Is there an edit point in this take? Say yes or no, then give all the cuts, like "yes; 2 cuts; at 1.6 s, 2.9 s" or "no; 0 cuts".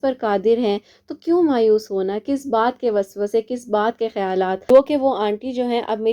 yes; 1 cut; at 4.7 s